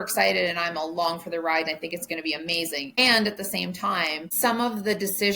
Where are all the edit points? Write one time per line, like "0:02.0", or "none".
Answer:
0:03.0
0:04.2